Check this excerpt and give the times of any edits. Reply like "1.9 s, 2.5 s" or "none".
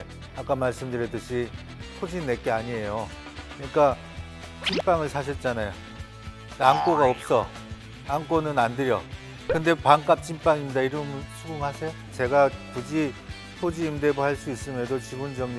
12.1 s